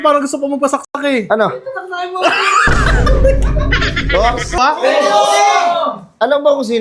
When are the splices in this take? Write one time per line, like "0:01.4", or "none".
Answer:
0:04.6